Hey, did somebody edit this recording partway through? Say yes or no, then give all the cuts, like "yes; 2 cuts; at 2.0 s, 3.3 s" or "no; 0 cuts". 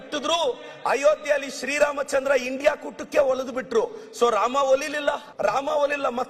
yes; 1 cut; at 5.3 s